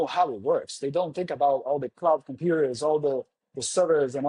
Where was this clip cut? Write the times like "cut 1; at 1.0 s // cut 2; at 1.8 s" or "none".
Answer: none